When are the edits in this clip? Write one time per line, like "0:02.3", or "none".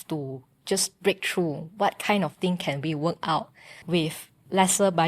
0:04.2